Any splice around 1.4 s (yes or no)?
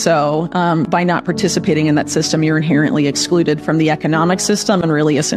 no